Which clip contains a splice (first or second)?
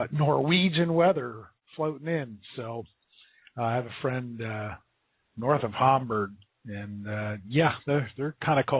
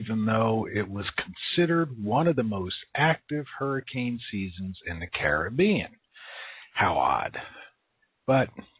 first